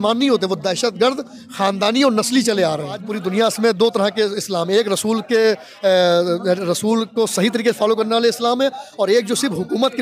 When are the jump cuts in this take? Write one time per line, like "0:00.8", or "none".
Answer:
0:03.1